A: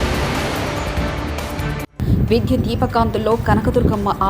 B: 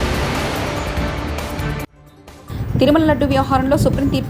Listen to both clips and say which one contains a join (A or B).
A